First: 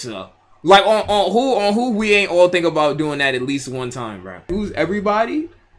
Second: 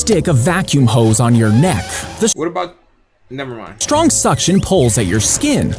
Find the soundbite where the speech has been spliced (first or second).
first